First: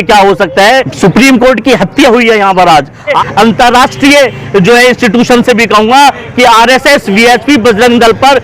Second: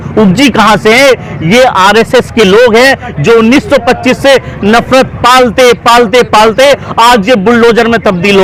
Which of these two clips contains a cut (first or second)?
first